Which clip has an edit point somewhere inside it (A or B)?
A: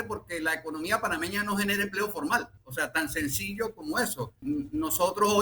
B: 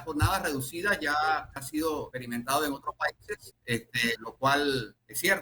A